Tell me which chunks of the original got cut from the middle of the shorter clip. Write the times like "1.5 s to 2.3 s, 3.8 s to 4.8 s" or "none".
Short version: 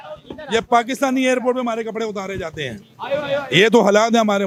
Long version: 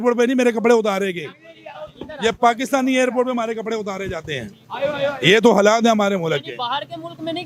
none